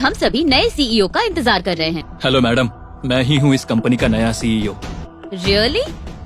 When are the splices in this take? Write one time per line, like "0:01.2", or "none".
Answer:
0:02.1
0:05.0